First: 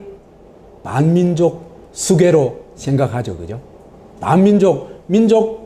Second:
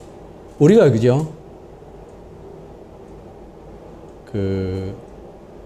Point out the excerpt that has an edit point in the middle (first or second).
second